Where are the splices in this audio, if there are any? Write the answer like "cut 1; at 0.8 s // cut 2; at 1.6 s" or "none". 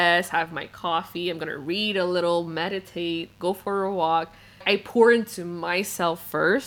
cut 1; at 4.6 s